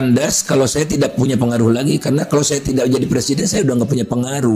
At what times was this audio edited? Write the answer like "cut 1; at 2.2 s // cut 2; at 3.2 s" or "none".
none